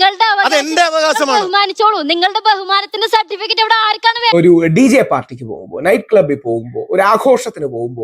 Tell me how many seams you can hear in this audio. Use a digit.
1